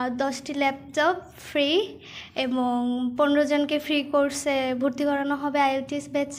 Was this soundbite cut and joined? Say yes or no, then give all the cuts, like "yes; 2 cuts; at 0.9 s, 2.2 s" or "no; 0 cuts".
no; 0 cuts